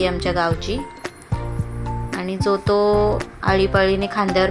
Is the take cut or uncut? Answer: uncut